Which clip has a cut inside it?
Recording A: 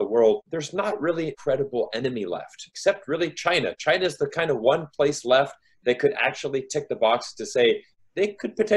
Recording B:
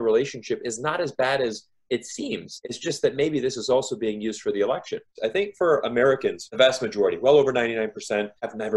B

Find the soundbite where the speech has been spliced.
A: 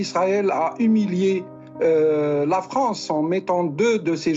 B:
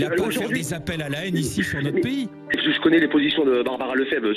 B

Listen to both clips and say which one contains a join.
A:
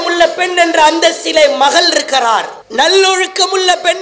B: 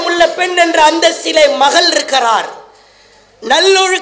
A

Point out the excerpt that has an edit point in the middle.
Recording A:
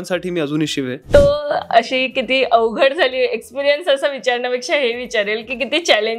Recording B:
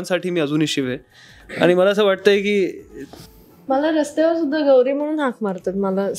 A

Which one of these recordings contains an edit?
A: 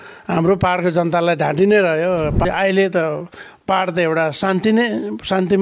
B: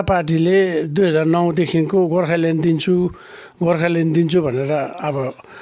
A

